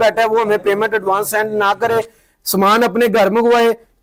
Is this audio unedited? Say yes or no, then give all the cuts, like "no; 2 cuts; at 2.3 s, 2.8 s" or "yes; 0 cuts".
yes; 0 cuts